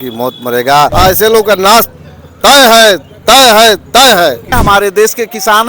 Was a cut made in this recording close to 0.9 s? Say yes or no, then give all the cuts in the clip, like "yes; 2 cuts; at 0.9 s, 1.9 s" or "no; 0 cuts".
yes; 2 cuts; at 0.9 s, 4.5 s